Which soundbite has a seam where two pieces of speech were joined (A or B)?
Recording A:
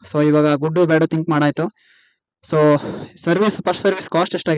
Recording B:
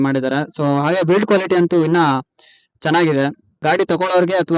B